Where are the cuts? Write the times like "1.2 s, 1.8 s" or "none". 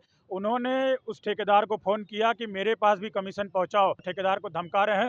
4.1 s